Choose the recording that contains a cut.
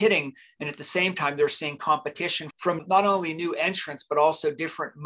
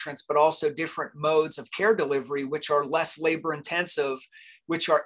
first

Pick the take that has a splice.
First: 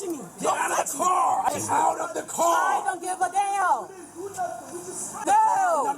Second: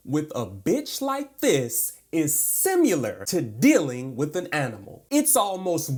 first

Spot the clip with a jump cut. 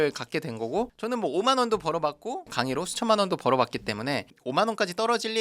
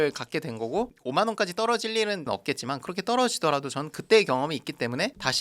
second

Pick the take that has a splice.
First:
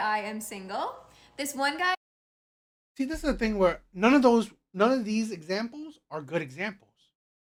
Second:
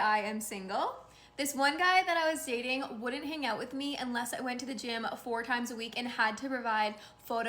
second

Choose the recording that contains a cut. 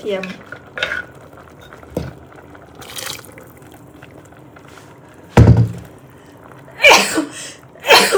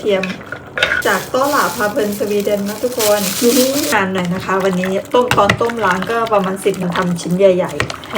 second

